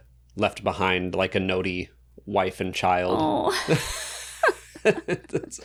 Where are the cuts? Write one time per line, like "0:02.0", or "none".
none